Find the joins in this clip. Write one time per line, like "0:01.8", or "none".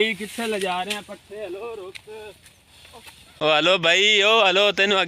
0:03.3